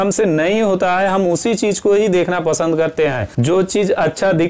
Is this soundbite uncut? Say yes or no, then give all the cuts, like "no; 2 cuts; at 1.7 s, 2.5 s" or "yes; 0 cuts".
no; 1 cut; at 3.4 s